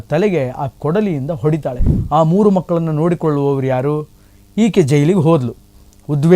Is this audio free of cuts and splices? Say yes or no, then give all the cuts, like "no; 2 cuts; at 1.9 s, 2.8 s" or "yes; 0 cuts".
no; 1 cut; at 1.9 s